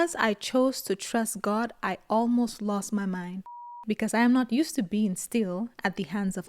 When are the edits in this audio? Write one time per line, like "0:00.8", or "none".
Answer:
0:03.8